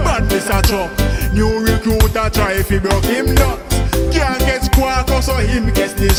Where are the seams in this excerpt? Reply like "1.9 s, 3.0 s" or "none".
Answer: none